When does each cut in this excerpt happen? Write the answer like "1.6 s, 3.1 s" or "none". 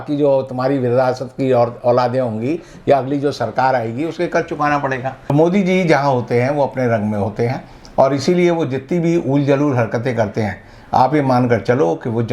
5.3 s